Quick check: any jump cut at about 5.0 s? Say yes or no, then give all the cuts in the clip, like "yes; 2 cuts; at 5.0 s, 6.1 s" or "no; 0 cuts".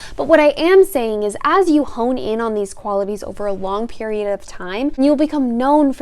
yes; 1 cut; at 5.0 s